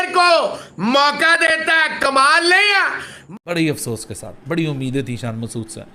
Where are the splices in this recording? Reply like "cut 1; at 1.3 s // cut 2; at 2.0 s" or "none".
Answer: cut 1; at 3.1 s